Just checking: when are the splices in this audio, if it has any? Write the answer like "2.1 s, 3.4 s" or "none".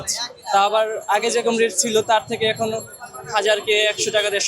none